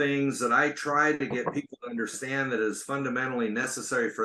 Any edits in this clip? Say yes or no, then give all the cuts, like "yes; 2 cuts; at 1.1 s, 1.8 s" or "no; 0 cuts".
no; 0 cuts